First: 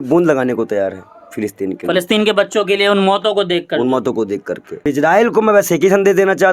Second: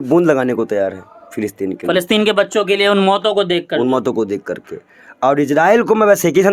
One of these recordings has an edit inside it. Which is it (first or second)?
first